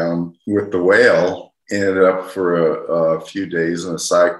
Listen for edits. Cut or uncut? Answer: cut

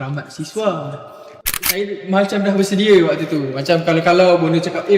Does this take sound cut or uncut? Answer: cut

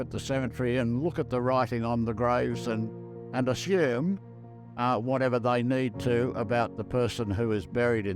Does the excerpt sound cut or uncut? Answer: uncut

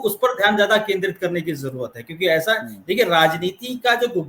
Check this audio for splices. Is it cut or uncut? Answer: uncut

